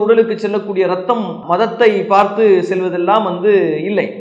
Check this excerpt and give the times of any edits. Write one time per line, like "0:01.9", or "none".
none